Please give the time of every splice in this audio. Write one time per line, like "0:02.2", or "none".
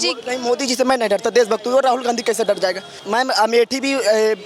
0:02.9